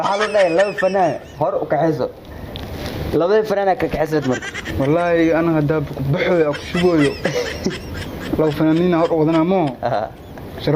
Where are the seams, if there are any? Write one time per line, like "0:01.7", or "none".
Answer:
0:04.6